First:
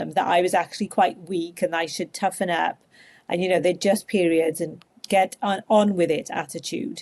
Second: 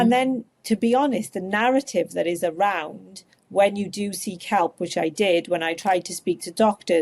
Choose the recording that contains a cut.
first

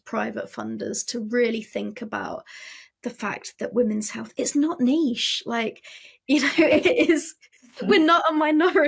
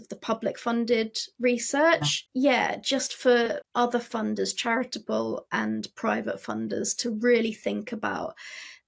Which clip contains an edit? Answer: second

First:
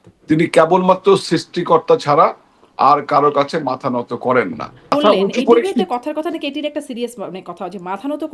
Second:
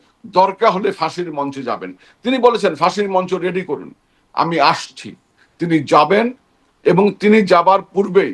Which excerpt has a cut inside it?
first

